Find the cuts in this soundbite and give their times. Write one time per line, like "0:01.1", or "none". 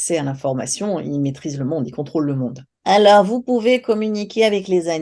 0:02.7